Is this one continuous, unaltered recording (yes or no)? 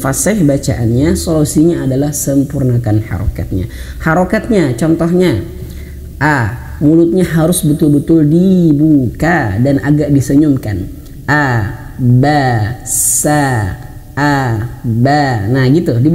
yes